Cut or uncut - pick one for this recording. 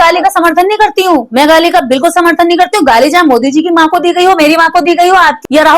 uncut